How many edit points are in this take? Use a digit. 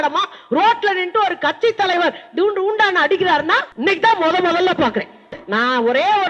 2